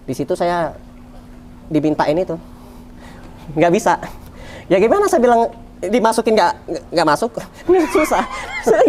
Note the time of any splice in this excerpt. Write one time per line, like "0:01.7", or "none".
none